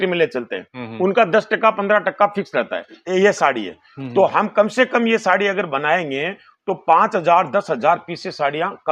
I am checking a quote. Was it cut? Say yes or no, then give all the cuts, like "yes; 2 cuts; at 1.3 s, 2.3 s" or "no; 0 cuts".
yes; 1 cut; at 2.9 s